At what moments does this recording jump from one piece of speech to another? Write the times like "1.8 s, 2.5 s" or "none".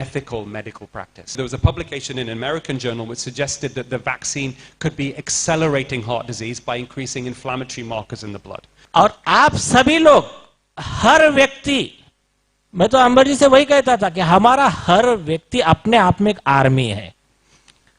1.4 s, 8.7 s